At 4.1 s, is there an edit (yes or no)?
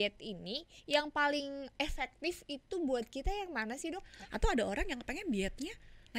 yes